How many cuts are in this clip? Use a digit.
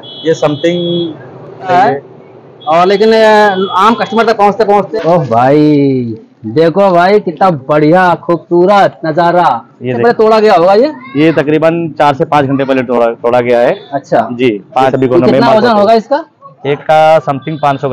4